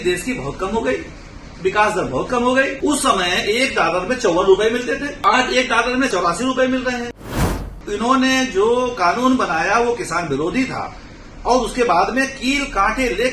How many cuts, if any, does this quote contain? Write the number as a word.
four